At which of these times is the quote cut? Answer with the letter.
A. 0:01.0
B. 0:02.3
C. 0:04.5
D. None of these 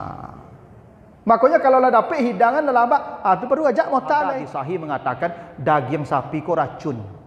C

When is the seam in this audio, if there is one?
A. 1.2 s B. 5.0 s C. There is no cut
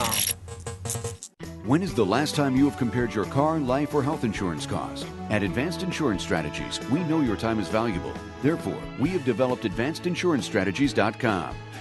A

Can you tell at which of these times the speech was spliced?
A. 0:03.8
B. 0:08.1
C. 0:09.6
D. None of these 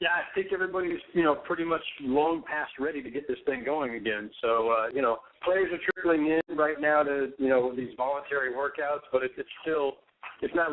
A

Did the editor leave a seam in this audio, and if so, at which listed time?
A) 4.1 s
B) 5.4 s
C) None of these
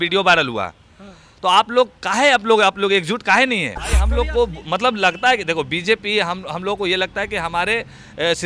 A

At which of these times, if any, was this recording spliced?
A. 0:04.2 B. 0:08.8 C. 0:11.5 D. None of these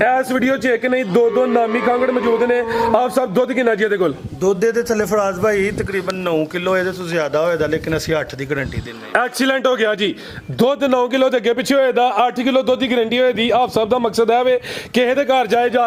D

